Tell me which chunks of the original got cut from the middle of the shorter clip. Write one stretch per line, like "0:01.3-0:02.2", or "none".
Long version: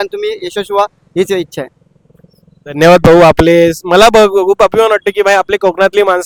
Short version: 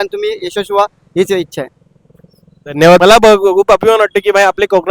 0:03.0-0:03.9